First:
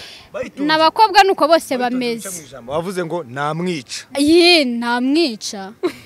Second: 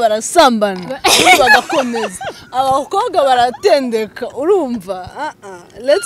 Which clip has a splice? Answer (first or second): first